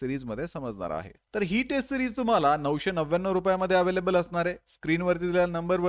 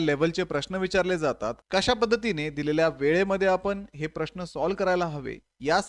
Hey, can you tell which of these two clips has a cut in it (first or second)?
first